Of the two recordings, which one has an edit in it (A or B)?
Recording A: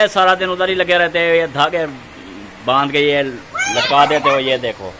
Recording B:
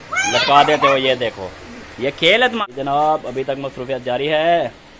B